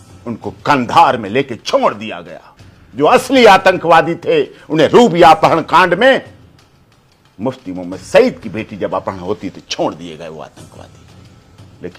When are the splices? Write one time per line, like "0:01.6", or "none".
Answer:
none